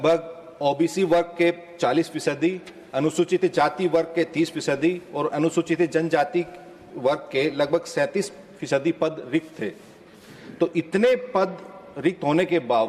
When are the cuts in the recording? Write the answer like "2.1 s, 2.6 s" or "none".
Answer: none